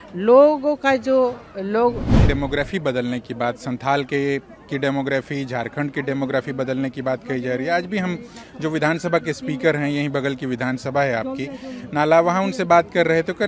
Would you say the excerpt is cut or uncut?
cut